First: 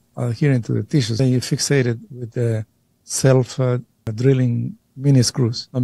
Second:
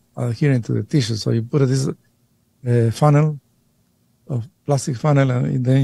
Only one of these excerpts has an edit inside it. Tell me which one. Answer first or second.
first